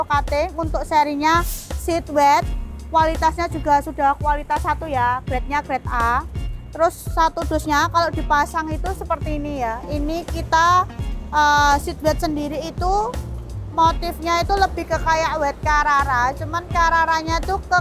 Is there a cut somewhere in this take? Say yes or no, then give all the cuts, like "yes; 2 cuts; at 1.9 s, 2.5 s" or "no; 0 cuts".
no; 0 cuts